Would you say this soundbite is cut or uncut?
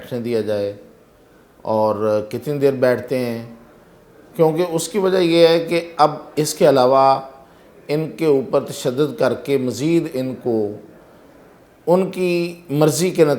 uncut